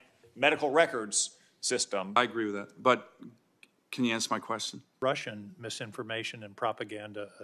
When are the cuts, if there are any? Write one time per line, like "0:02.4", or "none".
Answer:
0:02.2
0:04.9